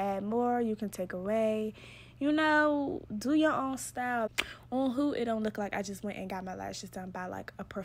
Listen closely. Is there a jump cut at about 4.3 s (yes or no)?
yes